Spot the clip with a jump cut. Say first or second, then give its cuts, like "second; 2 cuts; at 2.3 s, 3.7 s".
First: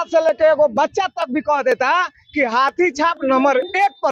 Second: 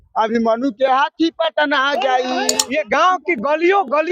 second; 1 cut; at 2.6 s